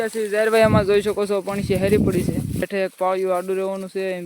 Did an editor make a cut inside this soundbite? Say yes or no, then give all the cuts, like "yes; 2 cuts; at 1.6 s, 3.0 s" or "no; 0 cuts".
yes; 1 cut; at 2.7 s